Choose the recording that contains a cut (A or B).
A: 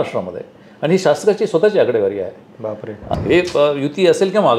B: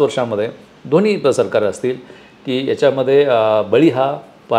A